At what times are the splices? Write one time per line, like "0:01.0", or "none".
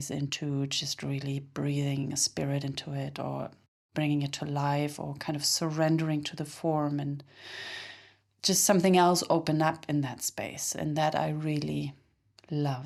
none